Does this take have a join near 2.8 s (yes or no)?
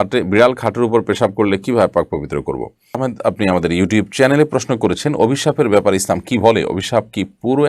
yes